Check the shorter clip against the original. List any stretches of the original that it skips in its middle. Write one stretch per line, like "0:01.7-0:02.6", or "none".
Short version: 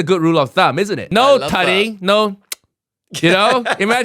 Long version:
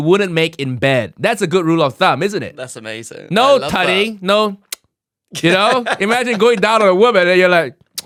0:02.4-0:03.2